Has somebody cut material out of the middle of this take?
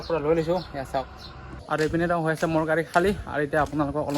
yes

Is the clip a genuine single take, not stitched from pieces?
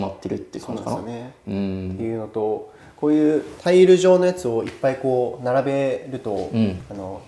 yes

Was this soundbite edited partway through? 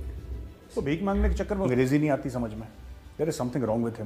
yes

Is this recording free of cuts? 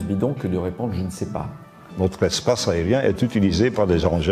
no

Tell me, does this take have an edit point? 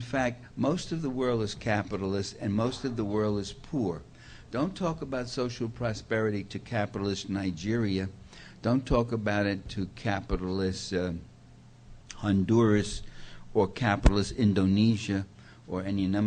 no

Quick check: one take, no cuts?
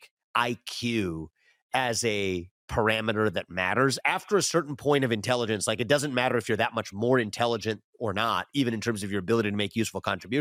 yes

